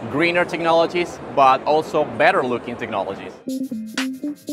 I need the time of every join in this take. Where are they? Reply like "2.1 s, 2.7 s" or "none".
none

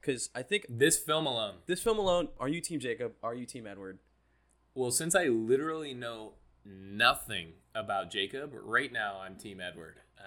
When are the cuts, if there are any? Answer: 2.4 s

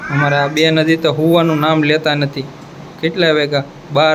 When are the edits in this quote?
none

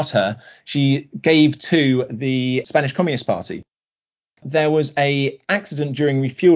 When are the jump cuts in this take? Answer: 2.6 s, 4.2 s

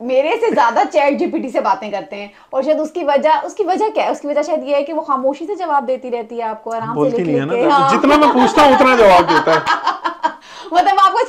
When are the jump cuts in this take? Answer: none

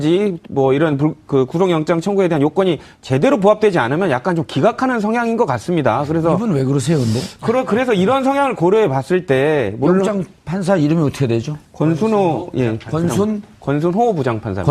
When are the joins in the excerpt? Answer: 7.4 s

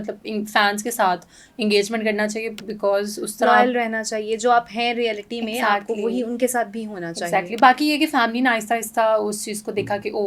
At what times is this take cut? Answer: none

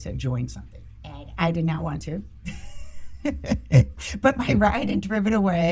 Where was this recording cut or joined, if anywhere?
none

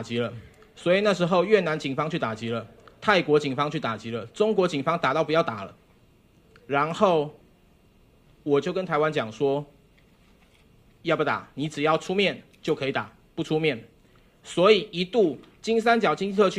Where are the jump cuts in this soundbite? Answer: none

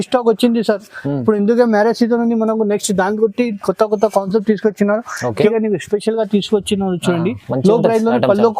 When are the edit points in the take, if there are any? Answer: 5.5 s

